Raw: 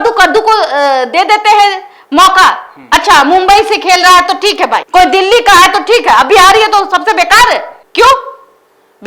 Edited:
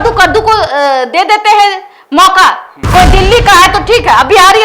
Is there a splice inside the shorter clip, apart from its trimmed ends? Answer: yes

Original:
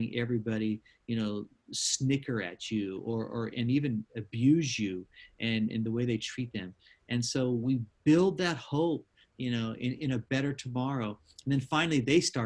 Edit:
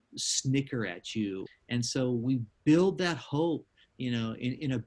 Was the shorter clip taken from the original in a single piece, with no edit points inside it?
no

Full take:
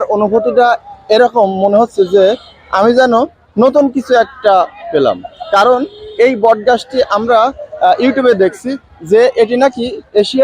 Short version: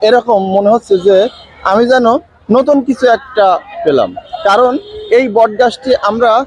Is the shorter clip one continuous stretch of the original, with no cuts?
yes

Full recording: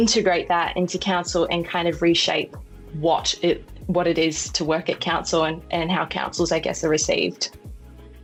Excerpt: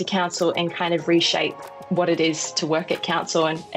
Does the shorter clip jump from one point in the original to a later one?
yes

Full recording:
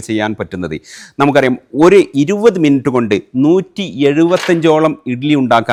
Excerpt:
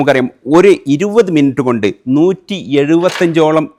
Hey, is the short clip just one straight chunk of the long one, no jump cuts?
yes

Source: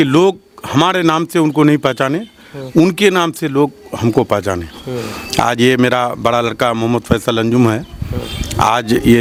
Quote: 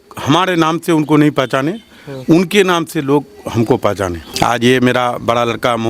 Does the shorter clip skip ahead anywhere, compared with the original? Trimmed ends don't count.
yes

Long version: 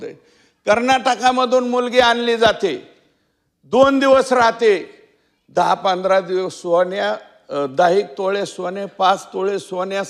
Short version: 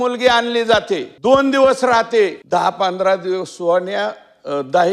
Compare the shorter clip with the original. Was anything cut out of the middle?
yes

